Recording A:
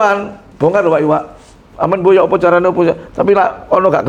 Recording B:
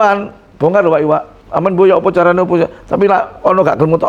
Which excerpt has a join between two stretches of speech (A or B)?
B